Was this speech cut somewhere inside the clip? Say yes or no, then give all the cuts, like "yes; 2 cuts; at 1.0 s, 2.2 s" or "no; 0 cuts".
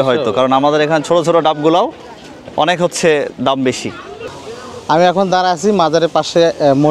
yes; 1 cut; at 4.6 s